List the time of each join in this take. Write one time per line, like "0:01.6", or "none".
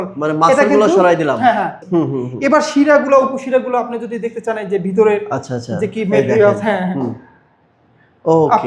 0:01.8